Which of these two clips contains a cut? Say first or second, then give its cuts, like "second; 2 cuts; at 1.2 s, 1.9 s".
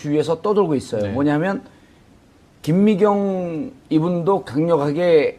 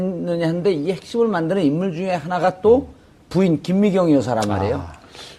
second; 1 cut; at 1.2 s